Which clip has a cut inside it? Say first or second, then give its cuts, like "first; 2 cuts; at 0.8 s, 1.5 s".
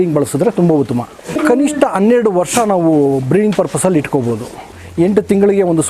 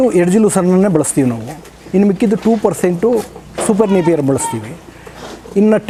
first; 1 cut; at 4.8 s